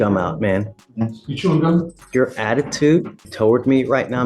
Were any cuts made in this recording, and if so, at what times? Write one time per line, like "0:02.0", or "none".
0:02.0
0:03.2